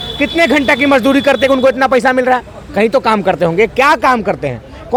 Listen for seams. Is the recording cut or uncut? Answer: uncut